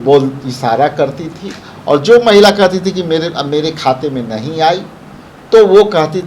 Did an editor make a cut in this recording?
no; 0 cuts

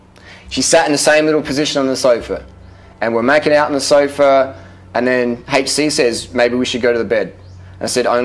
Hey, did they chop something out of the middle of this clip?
no; 0 cuts

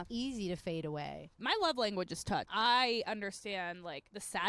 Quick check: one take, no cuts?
no; 2 cuts; at 1.4 s, 2.5 s

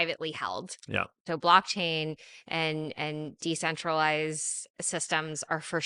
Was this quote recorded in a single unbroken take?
no; 1 cut; at 1.3 s

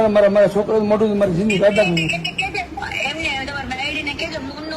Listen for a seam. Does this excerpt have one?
no; 0 cuts

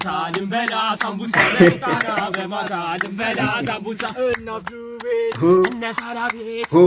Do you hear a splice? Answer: no; 0 cuts

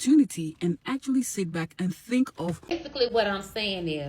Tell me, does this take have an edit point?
yes; 1 cut; at 2.8 s

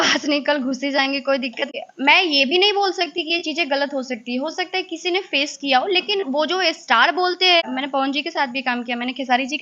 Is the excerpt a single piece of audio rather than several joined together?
no; 2 cuts; at 1.7 s, 7.7 s

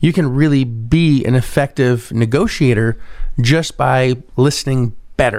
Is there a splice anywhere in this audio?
no; 0 cuts

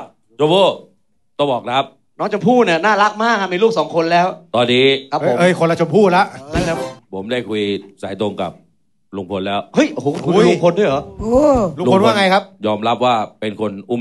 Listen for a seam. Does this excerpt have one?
yes; 1 cut; at 6.9 s

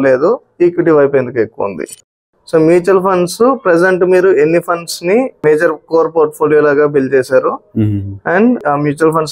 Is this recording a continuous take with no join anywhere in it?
no; 2 cuts; at 2.1 s, 5.4 s

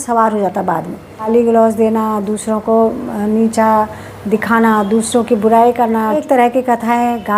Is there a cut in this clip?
yes; 2 cuts; at 1.3 s, 6.2 s

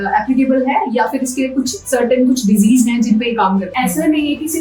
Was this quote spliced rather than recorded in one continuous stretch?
yes; 1 cut; at 3.7 s

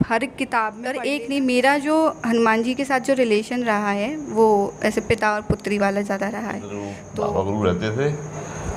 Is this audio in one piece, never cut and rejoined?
no; 2 cuts; at 1.0 s, 7.0 s

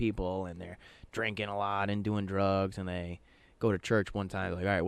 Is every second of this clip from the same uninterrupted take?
yes; 0 cuts

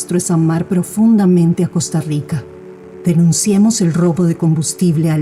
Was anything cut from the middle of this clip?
no; 0 cuts

